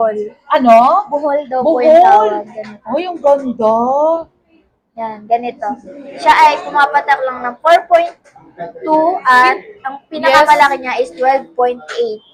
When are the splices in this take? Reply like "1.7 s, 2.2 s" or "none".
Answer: none